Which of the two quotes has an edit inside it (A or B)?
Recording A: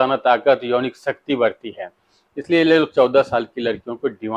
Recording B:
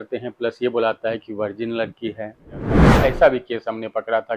B